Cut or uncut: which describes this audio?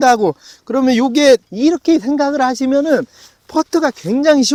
uncut